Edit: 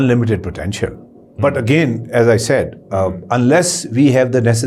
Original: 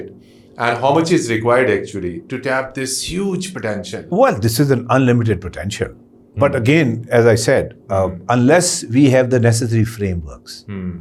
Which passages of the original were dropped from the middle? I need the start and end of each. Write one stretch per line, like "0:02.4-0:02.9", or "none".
none